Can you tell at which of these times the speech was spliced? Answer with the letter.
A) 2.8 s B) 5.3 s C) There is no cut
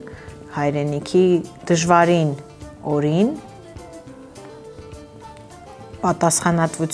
C